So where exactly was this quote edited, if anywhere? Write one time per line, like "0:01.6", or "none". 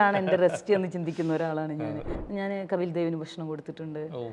0:02.1